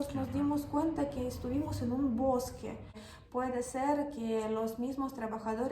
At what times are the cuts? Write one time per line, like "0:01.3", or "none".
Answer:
0:03.1